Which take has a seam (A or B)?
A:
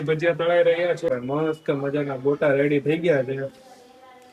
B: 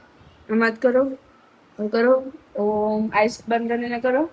A